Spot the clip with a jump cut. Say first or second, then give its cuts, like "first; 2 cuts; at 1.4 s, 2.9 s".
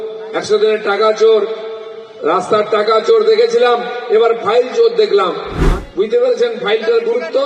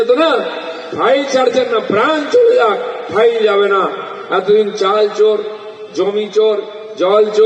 first; 1 cut; at 5.5 s